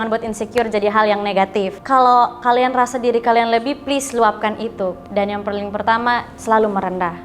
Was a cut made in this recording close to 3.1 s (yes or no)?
no